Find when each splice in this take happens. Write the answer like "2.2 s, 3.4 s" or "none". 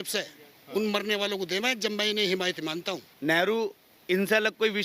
3.0 s